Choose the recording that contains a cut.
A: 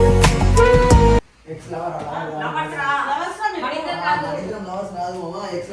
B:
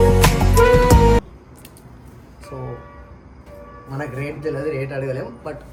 A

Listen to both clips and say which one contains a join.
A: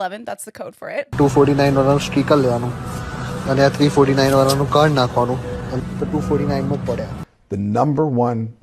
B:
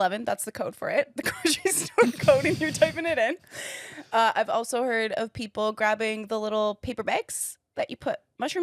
A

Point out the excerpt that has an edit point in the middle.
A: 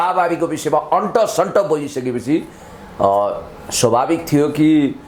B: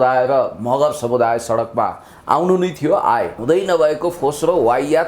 B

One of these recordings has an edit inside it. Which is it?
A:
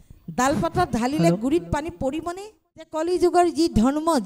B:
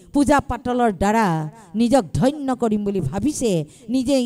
A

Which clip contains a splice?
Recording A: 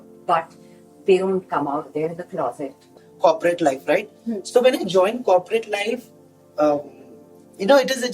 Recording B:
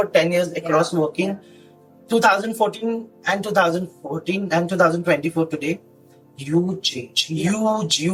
A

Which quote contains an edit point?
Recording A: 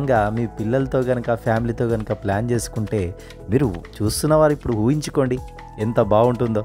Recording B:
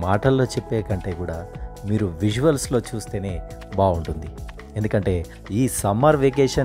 B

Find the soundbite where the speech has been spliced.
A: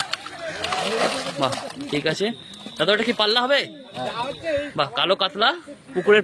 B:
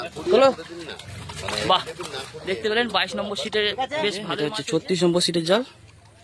B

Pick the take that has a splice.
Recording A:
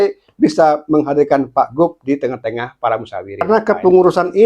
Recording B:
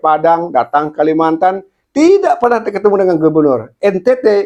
A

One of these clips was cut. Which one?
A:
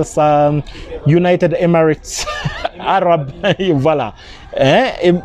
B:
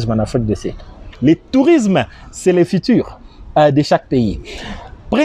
B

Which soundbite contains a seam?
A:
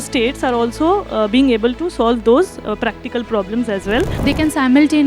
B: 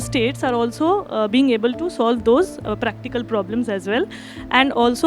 A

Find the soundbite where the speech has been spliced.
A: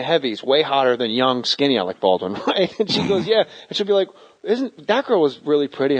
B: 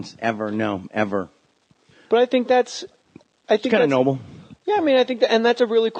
A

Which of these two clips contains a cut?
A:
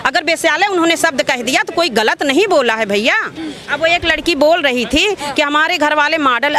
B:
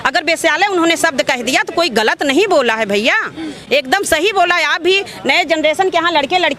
A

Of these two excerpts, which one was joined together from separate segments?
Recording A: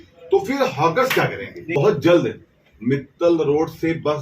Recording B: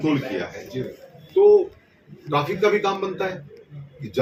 A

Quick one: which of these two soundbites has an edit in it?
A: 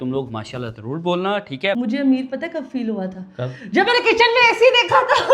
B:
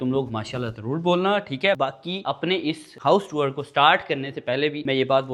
A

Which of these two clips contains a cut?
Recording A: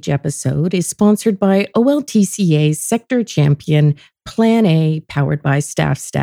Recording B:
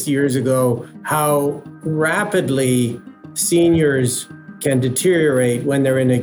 B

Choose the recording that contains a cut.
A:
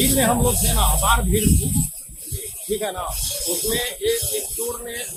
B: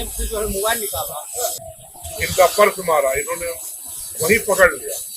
B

